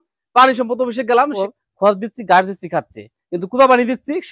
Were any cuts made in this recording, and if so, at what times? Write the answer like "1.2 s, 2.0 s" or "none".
1.3 s